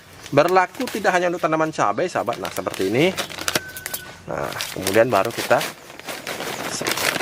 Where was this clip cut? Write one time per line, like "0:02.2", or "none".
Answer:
none